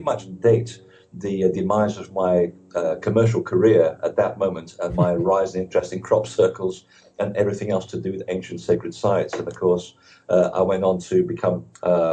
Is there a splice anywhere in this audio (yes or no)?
yes